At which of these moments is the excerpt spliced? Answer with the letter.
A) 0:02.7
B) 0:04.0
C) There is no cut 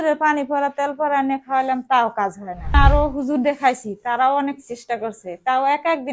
A